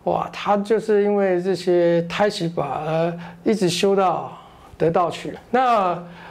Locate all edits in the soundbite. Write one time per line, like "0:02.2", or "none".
0:05.3